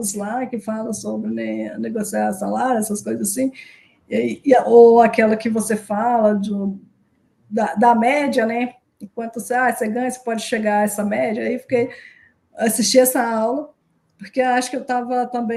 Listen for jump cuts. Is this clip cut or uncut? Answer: uncut